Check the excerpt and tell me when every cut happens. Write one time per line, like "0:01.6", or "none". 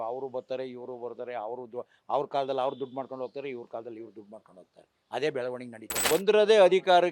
0:06.0